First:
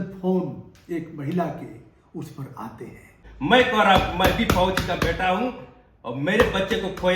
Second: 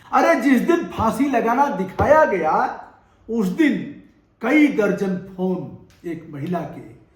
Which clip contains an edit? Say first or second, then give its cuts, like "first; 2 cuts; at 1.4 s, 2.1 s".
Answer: first; 1 cut; at 3.2 s